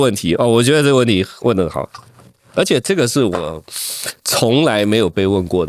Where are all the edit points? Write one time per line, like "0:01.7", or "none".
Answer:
none